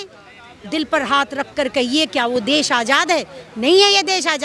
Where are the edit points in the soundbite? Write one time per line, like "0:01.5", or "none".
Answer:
none